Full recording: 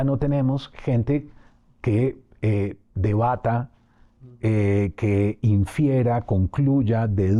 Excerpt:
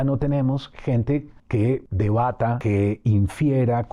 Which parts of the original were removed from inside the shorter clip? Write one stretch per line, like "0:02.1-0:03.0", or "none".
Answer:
0:01.7-0:02.8
0:03.6-0:05.0